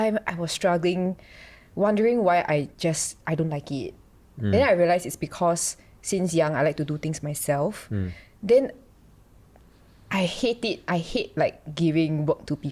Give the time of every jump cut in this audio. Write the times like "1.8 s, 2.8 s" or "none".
none